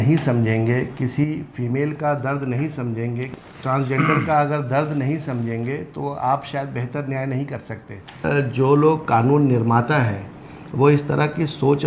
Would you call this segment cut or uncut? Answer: cut